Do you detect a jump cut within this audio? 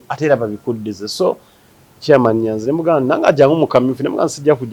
yes; 1 cut; at 1.8 s

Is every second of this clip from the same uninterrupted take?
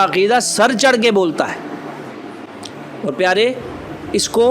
no; 1 cut; at 2.5 s

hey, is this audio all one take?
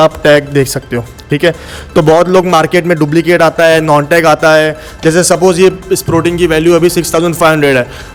yes; 0 cuts

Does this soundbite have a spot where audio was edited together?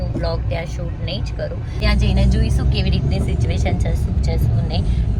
yes; 1 cut; at 1.7 s

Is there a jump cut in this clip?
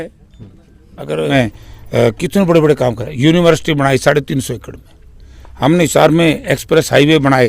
yes; 1 cut; at 1.3 s

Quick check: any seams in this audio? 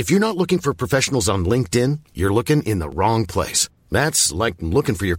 no; 0 cuts

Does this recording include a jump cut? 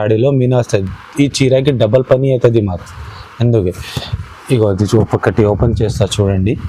no; 0 cuts

